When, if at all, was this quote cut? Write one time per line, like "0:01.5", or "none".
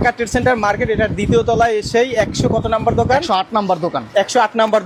none